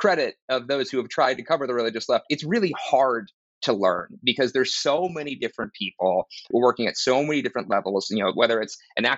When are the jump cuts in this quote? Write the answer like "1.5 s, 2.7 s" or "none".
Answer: none